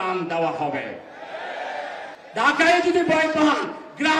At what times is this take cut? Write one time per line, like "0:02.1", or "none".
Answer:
0:02.1